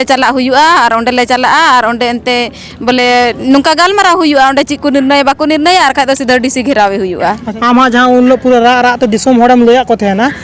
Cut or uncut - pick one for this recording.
cut